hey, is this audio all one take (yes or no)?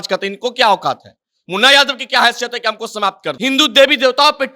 no